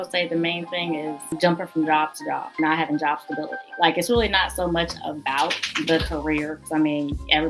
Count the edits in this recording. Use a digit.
3